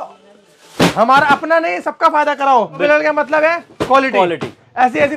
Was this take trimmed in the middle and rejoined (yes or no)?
yes